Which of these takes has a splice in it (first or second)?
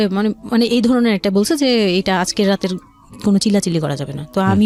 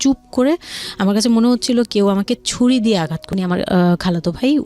second